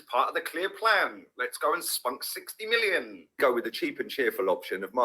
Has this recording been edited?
yes; 1 cut; at 3.4 s

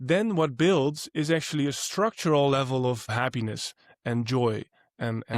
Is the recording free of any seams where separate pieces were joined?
no; 1 cut; at 3.1 s

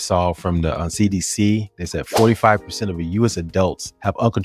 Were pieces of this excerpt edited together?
no; 0 cuts

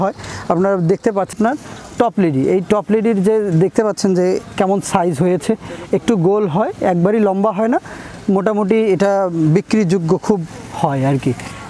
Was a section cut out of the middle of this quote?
yes; 1 cut; at 1.3 s

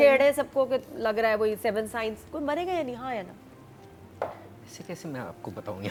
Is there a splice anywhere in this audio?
no; 0 cuts

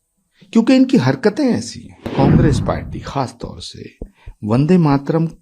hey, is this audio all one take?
no; 1 cut; at 2.1 s

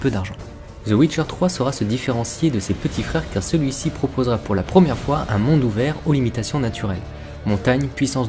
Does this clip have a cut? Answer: yes; 1 cut; at 3.8 s

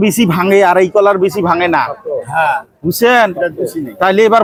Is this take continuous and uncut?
yes; 0 cuts

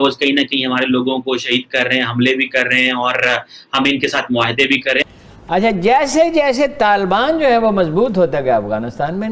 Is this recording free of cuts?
no; 1 cut; at 5.0 s

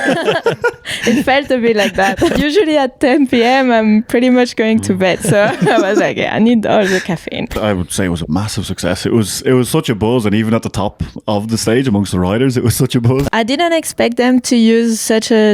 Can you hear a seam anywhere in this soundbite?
yes; 3 cuts; at 2.3 s, 7.6 s, 13.3 s

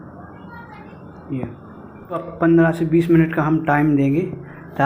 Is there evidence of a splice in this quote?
yes; 1 cut; at 2.3 s

